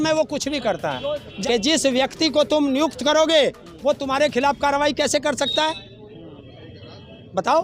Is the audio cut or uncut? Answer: cut